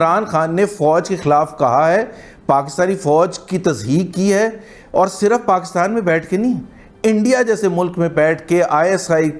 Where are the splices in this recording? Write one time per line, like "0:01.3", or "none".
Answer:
none